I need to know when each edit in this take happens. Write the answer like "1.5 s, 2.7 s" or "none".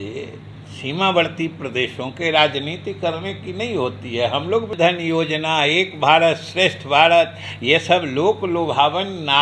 4.7 s